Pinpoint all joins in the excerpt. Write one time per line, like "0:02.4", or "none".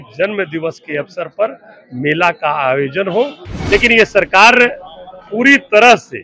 0:03.5